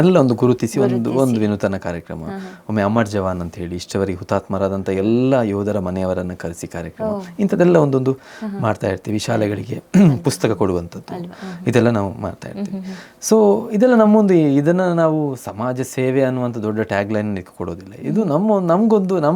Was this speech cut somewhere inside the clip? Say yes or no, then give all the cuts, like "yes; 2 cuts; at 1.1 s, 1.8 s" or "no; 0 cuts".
no; 0 cuts